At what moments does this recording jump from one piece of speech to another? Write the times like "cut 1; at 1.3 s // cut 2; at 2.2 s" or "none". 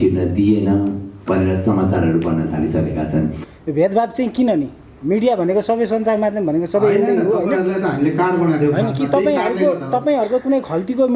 cut 1; at 3.4 s